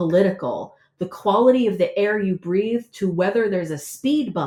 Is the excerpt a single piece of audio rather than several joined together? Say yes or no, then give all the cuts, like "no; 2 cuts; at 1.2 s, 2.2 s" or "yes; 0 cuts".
yes; 0 cuts